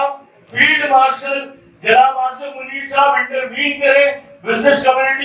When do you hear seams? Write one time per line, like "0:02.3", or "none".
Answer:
none